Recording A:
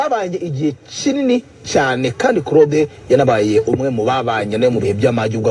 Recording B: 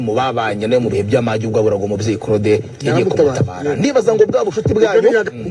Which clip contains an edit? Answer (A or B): B